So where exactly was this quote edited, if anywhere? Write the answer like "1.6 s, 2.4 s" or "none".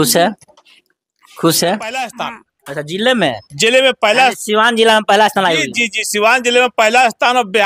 2.1 s